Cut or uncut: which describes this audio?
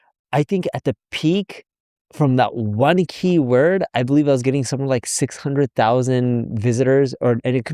uncut